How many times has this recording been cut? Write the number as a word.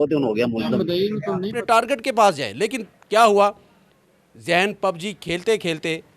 one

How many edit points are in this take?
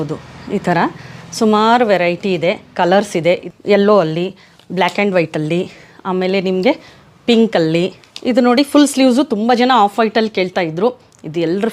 two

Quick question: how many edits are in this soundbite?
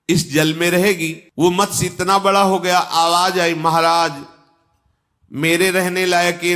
one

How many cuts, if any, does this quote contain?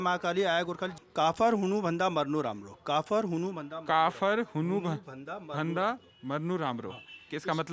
one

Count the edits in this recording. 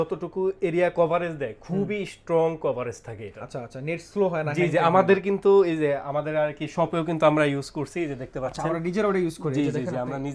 zero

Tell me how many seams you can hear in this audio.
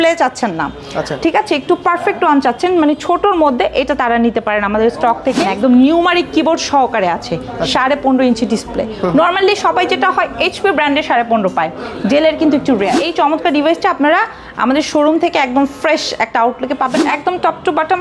three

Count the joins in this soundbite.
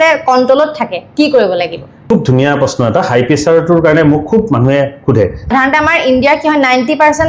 two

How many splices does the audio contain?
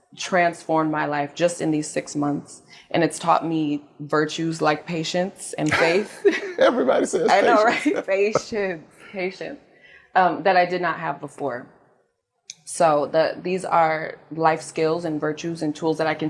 zero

